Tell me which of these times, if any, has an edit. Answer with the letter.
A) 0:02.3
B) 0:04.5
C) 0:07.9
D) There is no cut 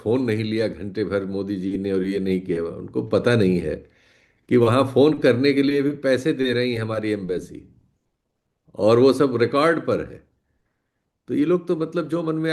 D